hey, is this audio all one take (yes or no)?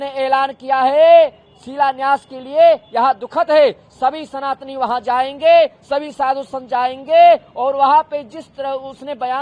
yes